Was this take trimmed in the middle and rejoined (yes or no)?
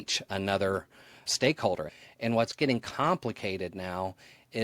yes